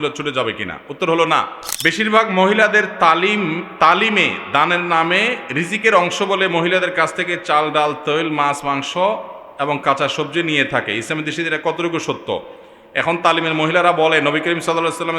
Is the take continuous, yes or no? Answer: no